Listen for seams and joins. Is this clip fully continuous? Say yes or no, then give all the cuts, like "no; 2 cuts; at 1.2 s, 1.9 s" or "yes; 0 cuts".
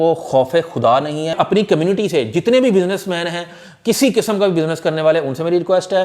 no; 1 cut; at 1.3 s